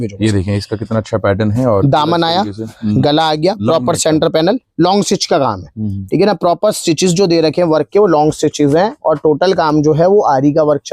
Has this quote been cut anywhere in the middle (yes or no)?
no